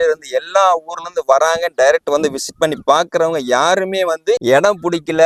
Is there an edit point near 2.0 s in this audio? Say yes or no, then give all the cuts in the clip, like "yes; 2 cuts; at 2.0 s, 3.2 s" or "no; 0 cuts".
no; 0 cuts